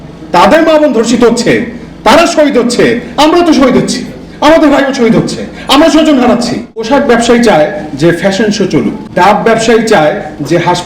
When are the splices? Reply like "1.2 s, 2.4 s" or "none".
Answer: 6.9 s, 9.0 s